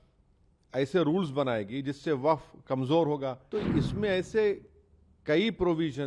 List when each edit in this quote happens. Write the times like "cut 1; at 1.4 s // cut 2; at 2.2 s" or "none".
cut 1; at 3.4 s

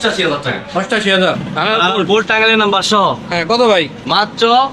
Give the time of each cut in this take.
cut 1; at 1.5 s

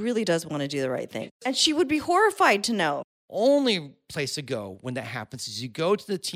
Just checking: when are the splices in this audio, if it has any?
cut 1; at 1.3 s // cut 2; at 3.0 s

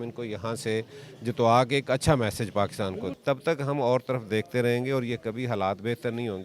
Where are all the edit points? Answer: cut 1; at 3.1 s

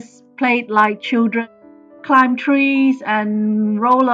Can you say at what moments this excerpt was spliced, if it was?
cut 1; at 1.4 s

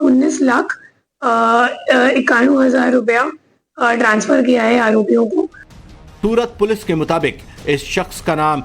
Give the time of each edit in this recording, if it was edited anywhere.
cut 1; at 6.8 s

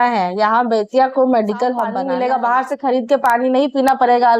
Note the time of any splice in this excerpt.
cut 1; at 1.9 s

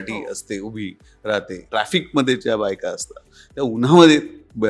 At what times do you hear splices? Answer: cut 1; at 1.6 s

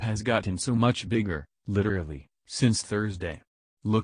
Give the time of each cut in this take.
none

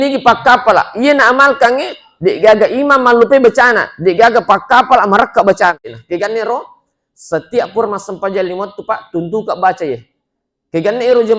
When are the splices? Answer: cut 1; at 5.9 s

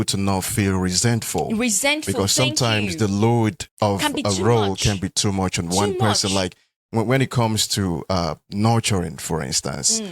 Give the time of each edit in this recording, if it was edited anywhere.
cut 1; at 3.6 s

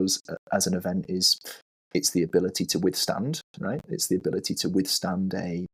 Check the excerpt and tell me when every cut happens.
none

